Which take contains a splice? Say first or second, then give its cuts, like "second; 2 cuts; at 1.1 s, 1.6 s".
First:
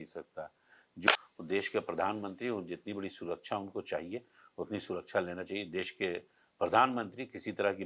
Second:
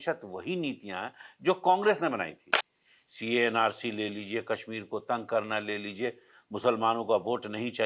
first; 1 cut; at 1.1 s